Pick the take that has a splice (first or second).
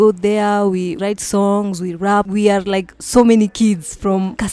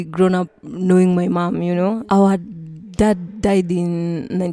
first